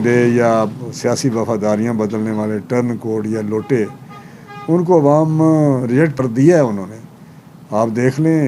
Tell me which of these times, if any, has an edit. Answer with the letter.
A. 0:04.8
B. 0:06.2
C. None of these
B